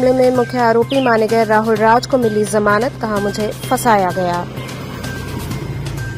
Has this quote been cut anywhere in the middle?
no; 0 cuts

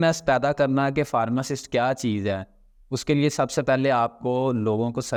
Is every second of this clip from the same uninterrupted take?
yes; 0 cuts

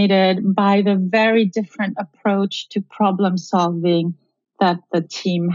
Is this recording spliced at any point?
no; 0 cuts

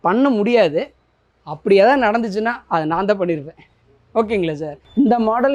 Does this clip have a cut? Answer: no; 0 cuts

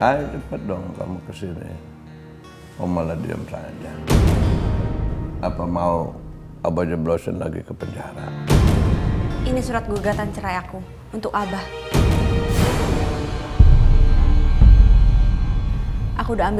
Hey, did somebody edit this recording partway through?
yes; 1 cut; at 9.4 s

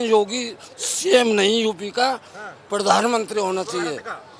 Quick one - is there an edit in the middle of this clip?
no; 0 cuts

